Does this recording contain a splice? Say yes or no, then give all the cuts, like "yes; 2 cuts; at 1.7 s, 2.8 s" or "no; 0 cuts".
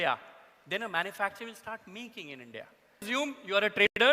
yes; 1 cut; at 3.0 s